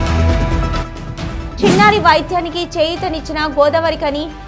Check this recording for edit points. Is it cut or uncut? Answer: cut